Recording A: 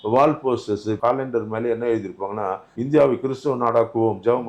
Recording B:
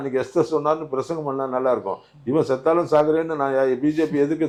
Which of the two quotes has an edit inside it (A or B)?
A